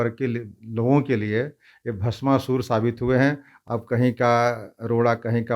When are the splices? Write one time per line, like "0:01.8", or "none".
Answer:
0:03.5